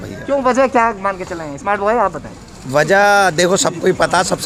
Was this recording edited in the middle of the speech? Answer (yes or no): no